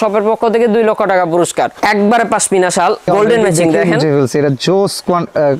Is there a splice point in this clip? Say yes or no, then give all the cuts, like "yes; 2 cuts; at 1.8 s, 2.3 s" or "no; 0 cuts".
yes; 1 cut; at 1.7 s